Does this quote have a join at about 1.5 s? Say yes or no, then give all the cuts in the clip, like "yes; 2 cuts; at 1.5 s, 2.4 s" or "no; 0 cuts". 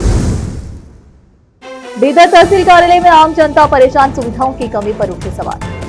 yes; 1 cut; at 1.5 s